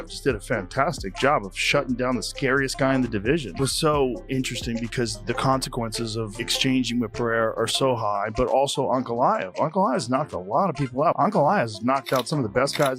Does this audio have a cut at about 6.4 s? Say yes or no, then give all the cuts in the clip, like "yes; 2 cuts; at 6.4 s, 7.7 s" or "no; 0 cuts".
yes; 3 cuts; at 3.5 s, 6.4 s, 11.1 s